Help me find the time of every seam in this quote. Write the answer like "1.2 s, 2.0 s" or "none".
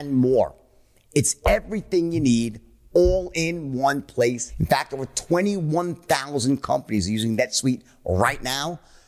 4.5 s